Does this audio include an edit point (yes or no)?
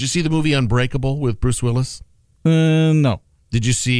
no